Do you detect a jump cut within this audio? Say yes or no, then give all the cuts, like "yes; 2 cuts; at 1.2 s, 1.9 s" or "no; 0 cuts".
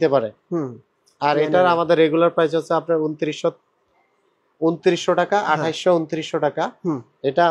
no; 0 cuts